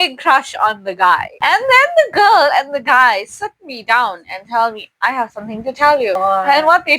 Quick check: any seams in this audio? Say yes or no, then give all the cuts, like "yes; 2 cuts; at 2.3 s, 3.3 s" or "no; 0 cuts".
yes; 2 cuts; at 1.3 s, 6.2 s